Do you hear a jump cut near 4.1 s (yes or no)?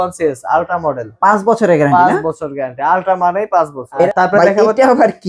yes